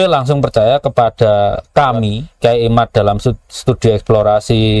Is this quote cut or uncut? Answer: cut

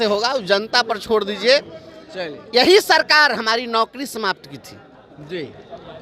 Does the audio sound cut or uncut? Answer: uncut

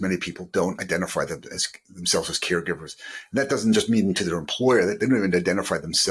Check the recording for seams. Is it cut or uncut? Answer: uncut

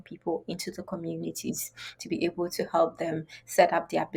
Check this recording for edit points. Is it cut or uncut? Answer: uncut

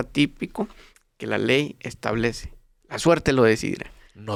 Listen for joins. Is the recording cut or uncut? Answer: uncut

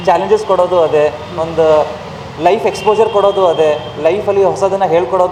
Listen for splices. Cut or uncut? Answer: uncut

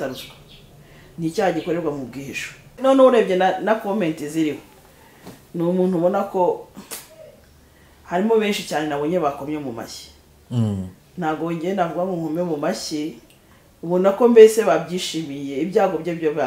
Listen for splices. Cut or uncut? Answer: cut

